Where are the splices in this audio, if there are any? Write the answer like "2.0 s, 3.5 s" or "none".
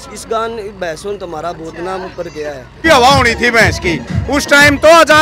2.8 s